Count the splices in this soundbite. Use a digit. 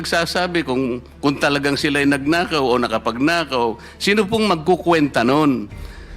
0